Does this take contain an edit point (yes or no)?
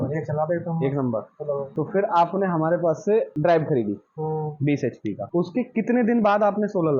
yes